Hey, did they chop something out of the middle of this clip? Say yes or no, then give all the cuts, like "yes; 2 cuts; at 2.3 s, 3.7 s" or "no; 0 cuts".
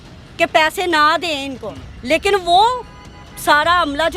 no; 0 cuts